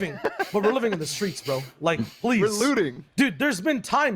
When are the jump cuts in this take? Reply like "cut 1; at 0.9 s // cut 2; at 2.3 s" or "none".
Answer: cut 1; at 3.0 s